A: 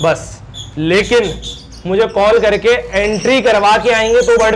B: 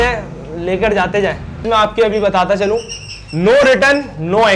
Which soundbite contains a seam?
B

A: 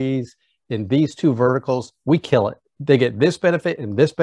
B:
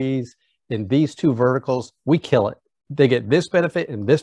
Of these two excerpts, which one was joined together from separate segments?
A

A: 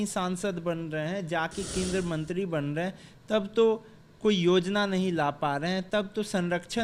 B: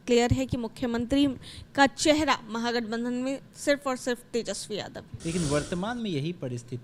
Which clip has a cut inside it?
B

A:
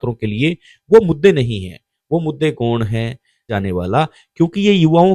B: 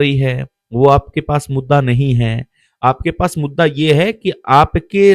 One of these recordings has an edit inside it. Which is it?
A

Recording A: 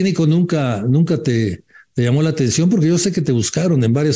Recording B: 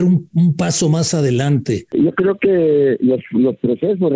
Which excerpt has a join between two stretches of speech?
B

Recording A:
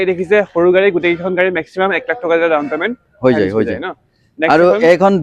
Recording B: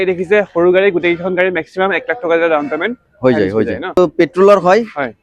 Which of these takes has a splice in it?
B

